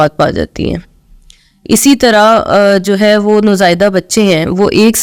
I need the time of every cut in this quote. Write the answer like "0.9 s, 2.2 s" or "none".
none